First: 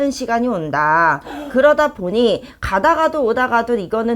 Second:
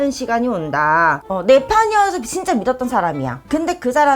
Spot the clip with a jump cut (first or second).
second